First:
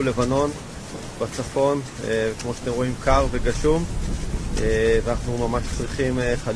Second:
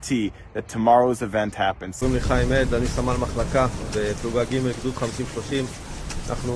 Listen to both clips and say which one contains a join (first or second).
second